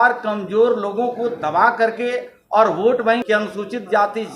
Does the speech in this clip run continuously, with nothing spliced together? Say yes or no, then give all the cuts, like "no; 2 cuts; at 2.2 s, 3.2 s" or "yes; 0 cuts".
no; 1 cut; at 3.2 s